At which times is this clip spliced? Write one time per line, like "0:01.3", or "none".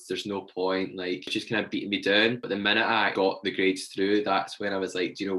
0:01.3
0:03.1